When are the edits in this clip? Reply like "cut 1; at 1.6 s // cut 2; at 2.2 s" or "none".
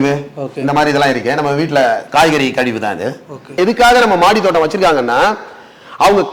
cut 1; at 3.6 s